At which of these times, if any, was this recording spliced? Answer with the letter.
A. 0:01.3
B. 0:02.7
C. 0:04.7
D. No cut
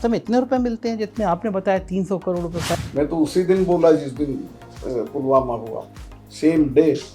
B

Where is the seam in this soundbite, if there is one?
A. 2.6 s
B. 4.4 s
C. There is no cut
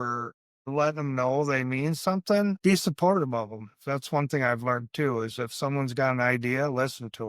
A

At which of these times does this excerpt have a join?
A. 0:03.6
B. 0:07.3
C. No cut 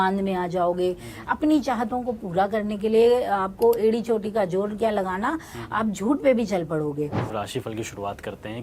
B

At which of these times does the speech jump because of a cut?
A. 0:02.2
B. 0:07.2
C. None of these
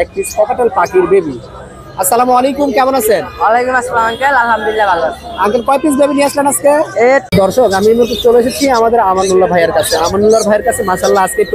B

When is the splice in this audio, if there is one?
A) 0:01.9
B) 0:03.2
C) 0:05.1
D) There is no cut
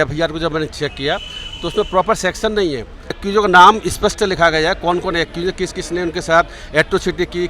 B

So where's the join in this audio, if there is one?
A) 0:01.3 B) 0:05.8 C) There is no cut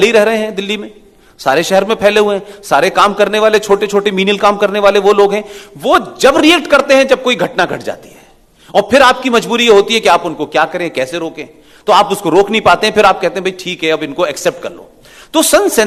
C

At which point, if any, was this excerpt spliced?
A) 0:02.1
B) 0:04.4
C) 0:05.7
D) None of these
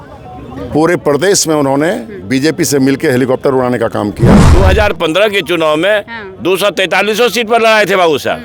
B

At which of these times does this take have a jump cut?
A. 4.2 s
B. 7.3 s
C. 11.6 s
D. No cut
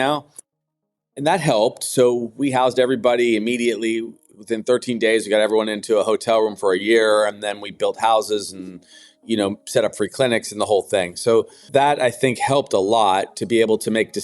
C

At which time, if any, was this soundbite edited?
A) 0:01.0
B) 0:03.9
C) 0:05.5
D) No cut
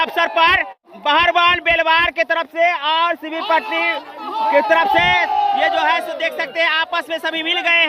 A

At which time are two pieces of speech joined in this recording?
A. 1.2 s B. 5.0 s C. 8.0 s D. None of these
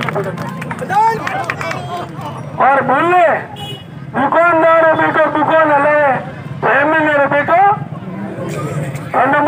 A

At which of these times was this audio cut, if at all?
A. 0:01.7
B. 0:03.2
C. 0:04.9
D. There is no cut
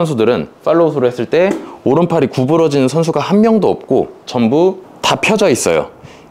C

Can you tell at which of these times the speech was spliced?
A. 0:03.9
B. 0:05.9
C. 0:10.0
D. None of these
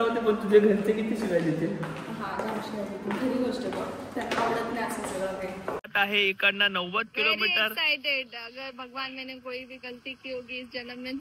B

